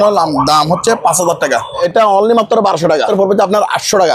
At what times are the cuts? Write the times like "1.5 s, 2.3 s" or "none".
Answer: 1.8 s, 3.1 s